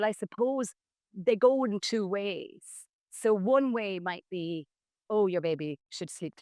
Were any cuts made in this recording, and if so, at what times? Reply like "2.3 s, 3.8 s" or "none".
none